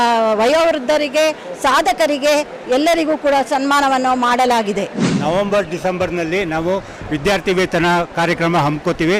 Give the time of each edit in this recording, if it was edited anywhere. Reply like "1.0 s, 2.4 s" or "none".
none